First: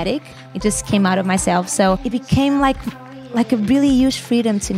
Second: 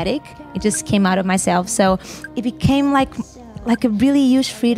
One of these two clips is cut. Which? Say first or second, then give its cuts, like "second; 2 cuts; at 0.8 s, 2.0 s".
first; 1 cut; at 2.0 s